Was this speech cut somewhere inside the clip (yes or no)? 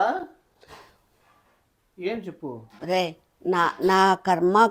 no